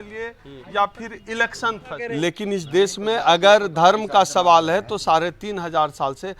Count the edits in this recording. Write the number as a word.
one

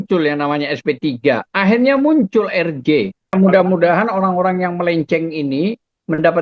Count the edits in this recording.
one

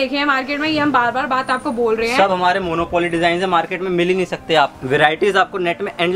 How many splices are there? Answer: one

